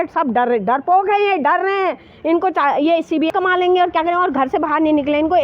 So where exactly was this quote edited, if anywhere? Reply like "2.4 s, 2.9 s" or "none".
2.4 s, 3.3 s